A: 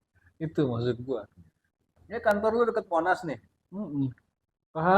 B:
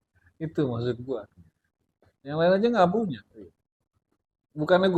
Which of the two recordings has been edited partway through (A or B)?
A